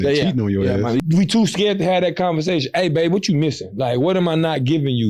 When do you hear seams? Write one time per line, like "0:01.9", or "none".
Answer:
0:01.0